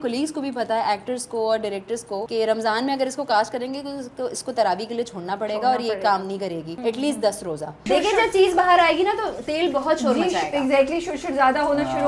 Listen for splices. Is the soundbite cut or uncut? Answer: cut